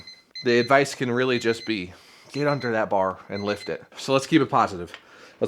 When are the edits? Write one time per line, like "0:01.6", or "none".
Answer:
0:03.9